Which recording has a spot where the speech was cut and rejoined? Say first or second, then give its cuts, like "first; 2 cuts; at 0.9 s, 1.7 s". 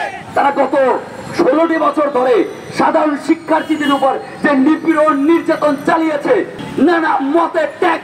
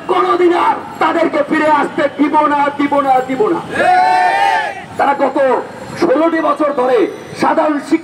first; 1 cut; at 6.6 s